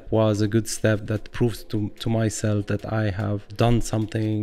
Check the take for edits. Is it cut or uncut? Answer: cut